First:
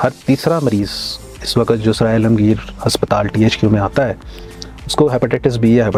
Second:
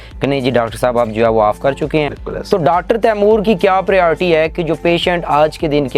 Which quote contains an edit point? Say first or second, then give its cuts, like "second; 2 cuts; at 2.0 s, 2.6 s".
second; 1 cut; at 2.2 s